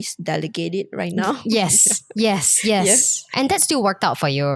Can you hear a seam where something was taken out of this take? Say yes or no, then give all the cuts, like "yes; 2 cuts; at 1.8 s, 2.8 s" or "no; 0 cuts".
yes; 1 cut; at 3.3 s